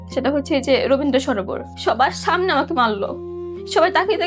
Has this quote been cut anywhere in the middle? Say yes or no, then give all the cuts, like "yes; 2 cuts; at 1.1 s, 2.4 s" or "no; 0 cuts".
yes; 1 cut; at 1.7 s